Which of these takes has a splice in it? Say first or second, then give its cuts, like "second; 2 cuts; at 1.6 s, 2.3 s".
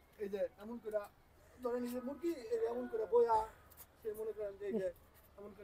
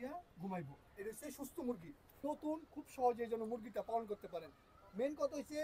second; 1 cut; at 2.2 s